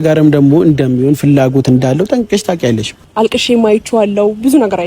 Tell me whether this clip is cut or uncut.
cut